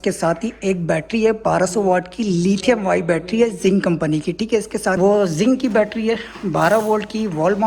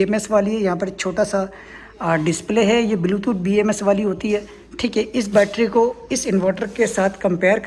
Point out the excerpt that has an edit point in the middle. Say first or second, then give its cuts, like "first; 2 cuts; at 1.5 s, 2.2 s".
first; 1 cut; at 5.0 s